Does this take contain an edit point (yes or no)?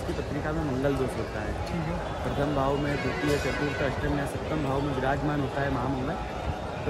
no